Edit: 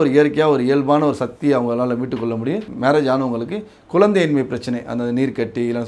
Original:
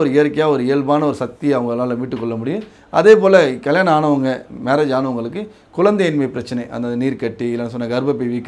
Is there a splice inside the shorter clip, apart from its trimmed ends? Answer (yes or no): yes